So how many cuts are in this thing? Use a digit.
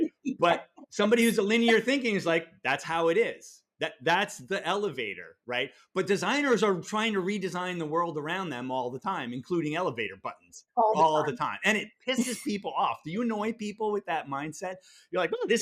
0